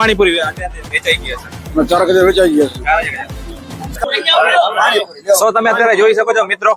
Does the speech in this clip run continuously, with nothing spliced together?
no; 1 cut; at 3.9 s

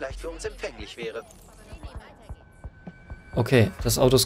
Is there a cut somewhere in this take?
no; 0 cuts

